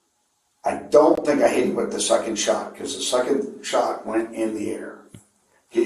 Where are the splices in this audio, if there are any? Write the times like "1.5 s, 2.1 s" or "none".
none